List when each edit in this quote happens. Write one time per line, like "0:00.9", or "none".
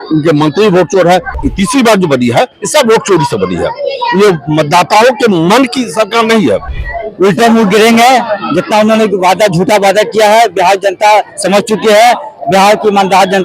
0:01.4
0:06.7